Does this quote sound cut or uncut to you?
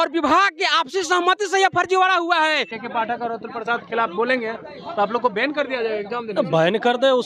cut